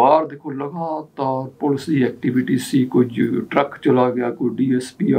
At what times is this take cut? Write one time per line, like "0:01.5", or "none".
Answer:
none